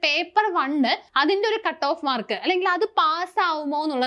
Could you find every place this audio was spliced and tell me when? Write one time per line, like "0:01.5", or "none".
0:01.1